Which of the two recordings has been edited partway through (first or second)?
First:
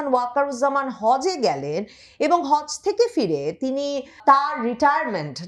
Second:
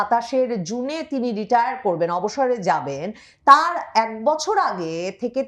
first